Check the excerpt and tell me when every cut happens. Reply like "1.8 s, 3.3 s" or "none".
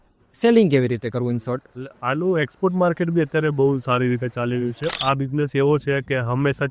4.9 s